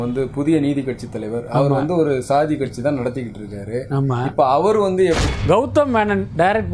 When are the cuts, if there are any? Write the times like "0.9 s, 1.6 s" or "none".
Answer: 5.2 s